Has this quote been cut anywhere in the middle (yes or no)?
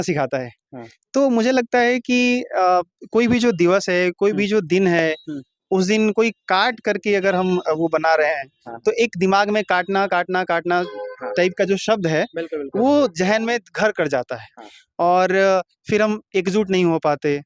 no